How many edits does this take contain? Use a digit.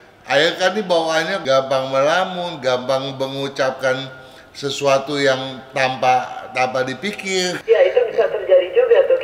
2